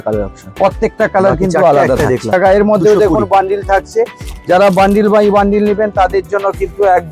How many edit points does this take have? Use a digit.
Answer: 1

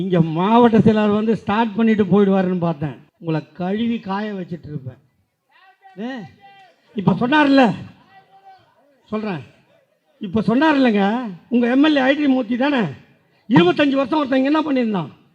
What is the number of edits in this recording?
1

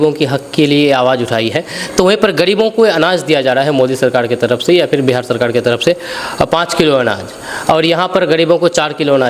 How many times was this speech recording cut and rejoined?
0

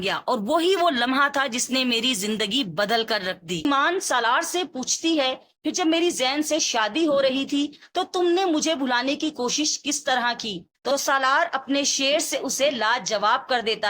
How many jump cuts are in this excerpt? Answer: 1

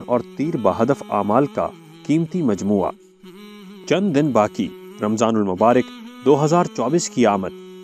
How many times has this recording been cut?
0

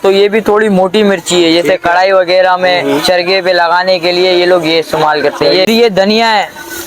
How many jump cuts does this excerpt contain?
1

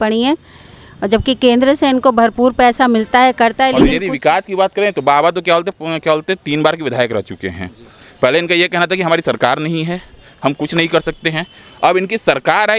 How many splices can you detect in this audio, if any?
1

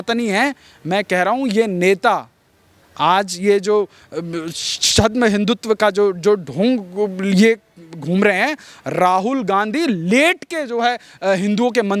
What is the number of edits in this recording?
0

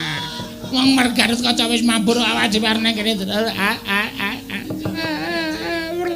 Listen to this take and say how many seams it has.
1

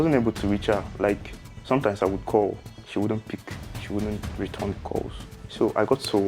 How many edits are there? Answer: 1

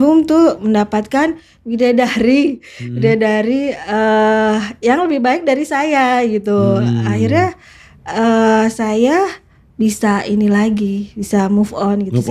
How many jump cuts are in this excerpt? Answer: 0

